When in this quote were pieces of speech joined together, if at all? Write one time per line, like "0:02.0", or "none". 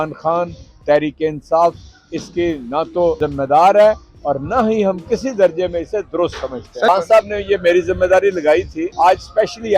0:03.2
0:06.9
0:08.8